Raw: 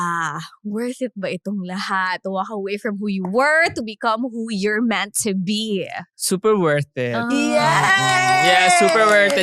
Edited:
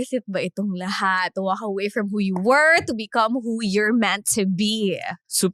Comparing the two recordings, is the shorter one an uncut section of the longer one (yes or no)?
yes